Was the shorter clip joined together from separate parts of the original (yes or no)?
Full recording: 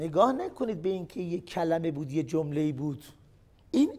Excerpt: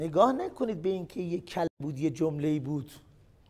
yes